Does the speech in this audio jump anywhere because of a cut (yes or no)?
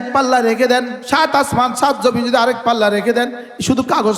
yes